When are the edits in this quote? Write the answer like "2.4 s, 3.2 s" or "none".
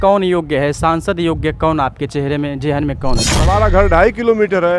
3.3 s